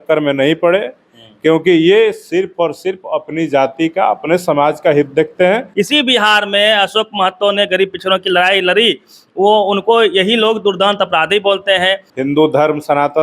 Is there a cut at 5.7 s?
yes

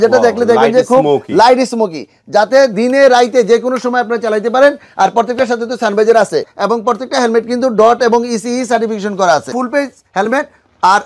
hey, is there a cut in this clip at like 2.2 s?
no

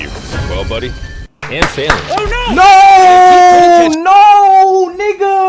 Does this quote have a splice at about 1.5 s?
yes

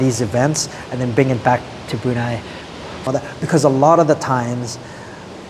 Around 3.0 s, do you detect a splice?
yes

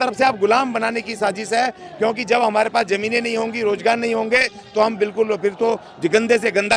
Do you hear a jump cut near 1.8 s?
no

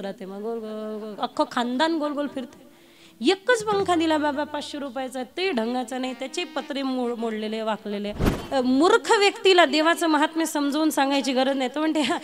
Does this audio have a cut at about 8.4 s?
yes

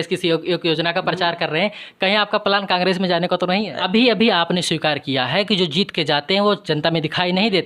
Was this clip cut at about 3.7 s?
yes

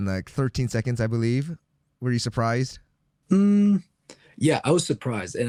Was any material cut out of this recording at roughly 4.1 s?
no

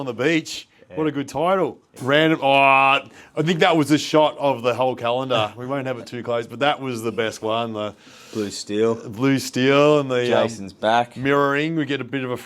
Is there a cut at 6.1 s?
no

